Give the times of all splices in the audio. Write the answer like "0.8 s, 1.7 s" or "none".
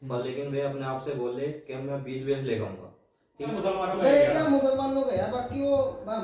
3.6 s